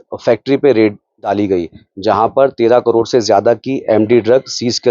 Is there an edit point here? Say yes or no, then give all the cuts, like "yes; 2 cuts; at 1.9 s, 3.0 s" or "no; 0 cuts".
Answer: yes; 1 cut; at 1.3 s